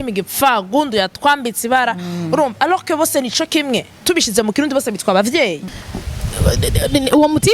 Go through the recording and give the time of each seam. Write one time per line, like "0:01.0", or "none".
0:05.7